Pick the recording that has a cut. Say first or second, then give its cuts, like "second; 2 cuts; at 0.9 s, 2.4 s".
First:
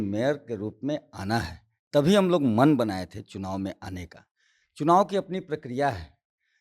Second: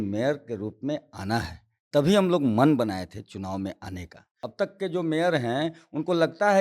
second; 1 cut; at 4.4 s